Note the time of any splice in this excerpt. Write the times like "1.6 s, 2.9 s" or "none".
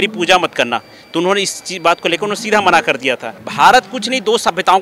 3.4 s